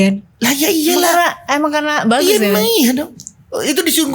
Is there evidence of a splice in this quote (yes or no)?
no